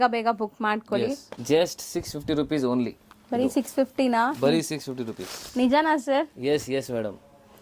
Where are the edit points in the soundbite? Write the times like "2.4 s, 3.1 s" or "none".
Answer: 1.3 s